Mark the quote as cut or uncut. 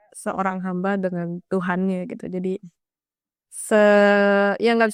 uncut